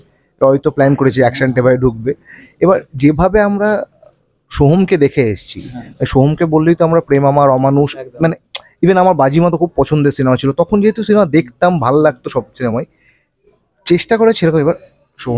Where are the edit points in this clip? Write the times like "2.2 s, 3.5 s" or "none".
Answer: none